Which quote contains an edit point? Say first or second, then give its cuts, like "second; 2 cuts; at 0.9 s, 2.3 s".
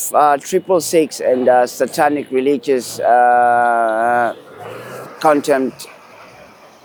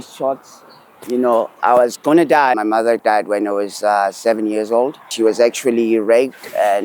second; 2 cuts; at 2.5 s, 5.1 s